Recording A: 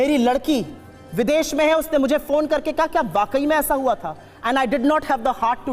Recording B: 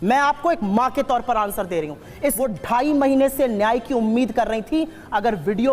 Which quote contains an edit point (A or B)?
B